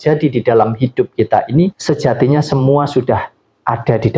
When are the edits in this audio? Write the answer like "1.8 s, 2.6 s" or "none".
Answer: 1.8 s